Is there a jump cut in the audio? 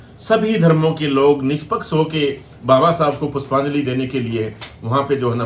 no; 0 cuts

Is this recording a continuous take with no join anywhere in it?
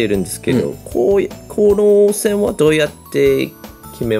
yes; 0 cuts

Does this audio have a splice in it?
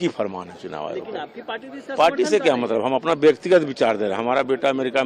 no; 0 cuts

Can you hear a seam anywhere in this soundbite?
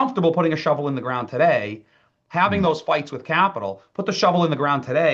no; 0 cuts

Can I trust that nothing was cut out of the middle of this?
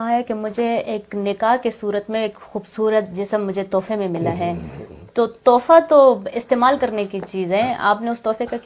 yes; 0 cuts

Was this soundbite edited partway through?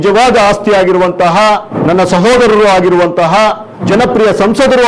yes; 2 cuts; at 1.7 s, 3.8 s

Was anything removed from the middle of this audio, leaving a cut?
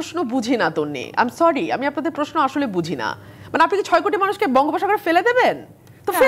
no; 0 cuts

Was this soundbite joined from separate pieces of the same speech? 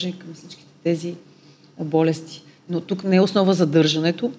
no; 0 cuts

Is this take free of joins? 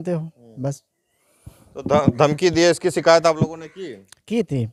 yes; 0 cuts

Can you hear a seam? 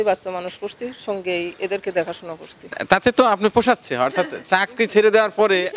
yes; 1 cut; at 2.8 s

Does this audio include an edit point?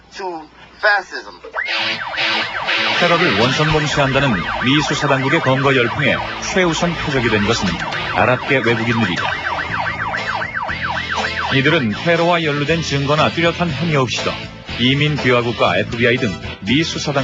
yes; 1 cut; at 8.3 s

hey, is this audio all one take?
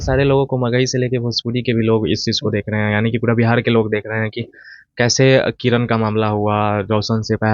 yes; 0 cuts

